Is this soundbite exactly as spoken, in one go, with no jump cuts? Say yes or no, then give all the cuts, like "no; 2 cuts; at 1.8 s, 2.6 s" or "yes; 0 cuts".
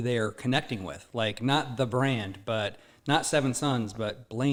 yes; 0 cuts